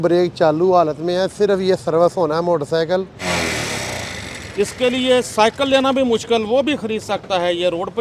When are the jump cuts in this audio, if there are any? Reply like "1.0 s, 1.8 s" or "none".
3.3 s